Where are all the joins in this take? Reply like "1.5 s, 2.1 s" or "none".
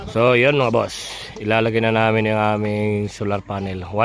none